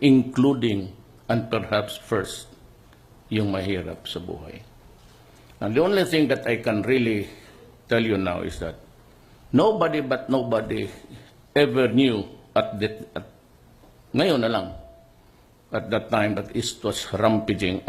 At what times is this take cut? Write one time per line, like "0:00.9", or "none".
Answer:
none